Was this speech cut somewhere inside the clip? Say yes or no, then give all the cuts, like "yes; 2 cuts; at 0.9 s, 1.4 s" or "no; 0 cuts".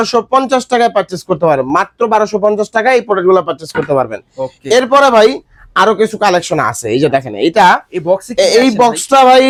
no; 0 cuts